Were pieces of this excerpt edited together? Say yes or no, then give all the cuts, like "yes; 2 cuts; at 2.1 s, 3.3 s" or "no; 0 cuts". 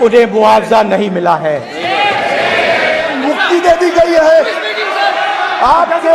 yes; 1 cut; at 3.1 s